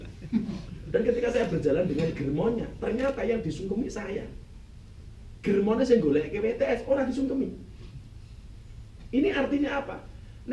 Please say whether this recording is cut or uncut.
uncut